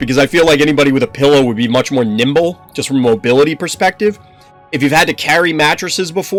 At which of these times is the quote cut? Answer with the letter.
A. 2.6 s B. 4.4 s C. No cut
C